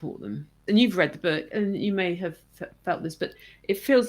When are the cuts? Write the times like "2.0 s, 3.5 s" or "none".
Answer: 1.5 s